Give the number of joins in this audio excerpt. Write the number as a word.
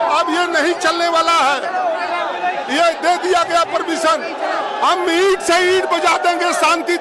zero